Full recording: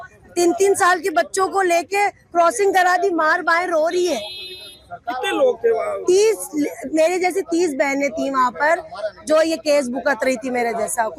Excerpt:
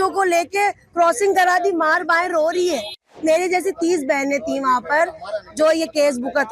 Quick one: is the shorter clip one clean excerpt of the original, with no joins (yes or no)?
no